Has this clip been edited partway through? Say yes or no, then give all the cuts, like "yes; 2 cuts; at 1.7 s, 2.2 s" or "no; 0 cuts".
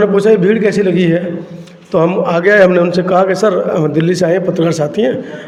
no; 0 cuts